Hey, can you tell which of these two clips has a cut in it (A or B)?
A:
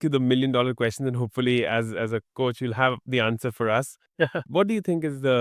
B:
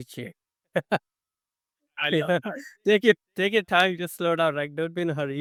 A